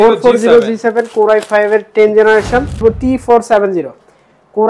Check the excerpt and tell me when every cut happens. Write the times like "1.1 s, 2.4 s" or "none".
2.8 s